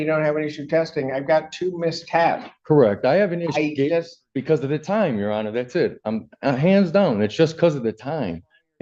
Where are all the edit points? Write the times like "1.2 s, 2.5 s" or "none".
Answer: none